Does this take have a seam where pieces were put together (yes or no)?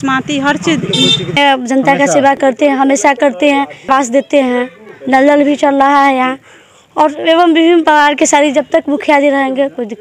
yes